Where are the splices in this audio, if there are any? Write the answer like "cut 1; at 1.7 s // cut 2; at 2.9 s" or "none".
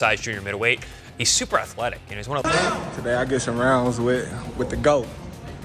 cut 1; at 2.4 s